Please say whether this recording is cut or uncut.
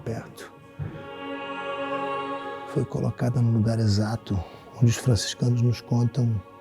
cut